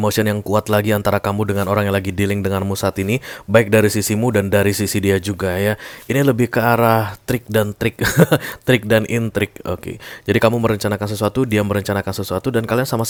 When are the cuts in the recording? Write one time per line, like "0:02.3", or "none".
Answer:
none